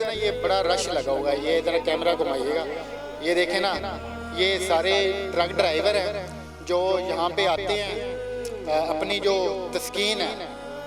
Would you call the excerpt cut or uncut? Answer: uncut